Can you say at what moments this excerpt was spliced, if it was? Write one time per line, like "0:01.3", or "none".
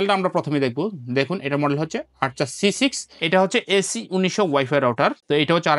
0:03.1